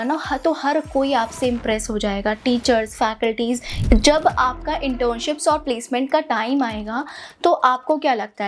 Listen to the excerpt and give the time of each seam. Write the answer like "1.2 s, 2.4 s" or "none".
3.8 s